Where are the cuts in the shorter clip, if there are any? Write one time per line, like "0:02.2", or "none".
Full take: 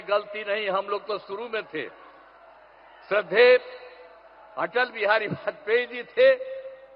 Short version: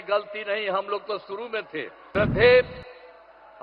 0:02.0